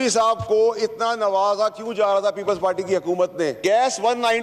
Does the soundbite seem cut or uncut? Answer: uncut